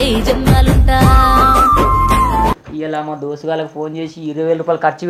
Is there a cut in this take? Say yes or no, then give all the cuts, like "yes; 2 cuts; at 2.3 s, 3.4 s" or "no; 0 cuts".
no; 0 cuts